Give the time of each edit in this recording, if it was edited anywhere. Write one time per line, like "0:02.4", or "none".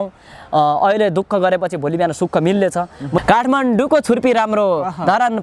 0:03.2